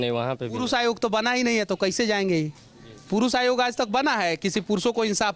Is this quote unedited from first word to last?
yes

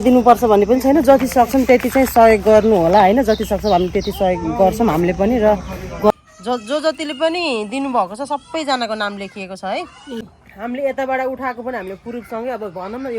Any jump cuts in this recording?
yes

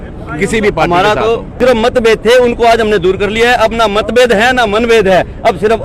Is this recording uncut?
no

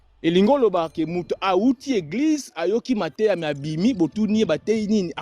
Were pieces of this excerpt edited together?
no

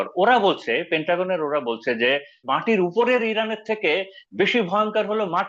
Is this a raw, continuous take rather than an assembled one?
no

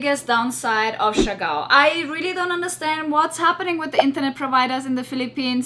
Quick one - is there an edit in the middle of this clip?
no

